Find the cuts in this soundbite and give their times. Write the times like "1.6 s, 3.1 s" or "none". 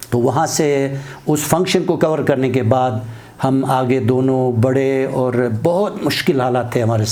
none